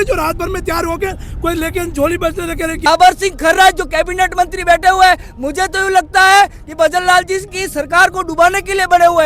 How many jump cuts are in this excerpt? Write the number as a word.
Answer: one